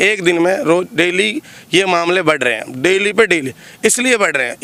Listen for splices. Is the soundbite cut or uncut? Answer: uncut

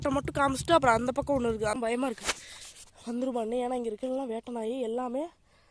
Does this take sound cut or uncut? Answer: cut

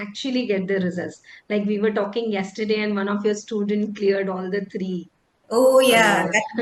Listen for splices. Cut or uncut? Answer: uncut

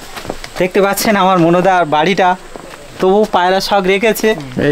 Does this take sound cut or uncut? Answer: uncut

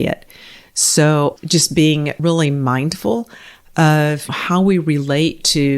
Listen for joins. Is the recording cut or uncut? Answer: cut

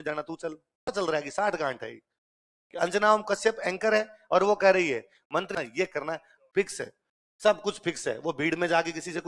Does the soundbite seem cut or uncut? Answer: cut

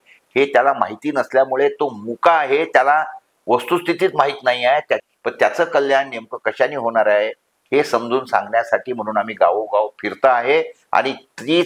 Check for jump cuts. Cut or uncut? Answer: cut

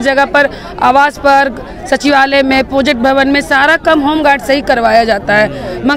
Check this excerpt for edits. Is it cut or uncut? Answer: uncut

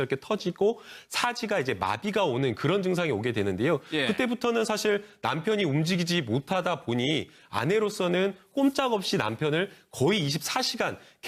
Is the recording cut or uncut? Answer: uncut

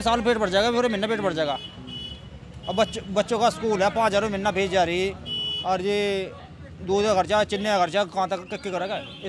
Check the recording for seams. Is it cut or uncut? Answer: uncut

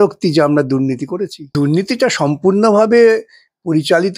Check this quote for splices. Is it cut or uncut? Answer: cut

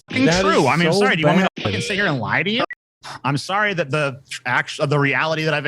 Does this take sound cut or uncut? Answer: cut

